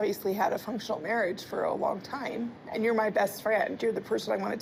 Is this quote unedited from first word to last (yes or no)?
yes